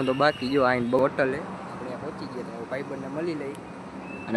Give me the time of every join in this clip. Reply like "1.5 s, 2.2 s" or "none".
0.9 s